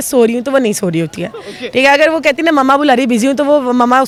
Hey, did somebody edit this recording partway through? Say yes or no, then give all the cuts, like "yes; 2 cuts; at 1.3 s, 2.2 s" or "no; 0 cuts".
no; 0 cuts